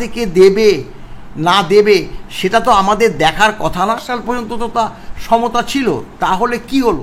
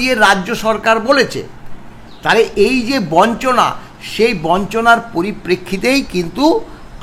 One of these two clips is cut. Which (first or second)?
first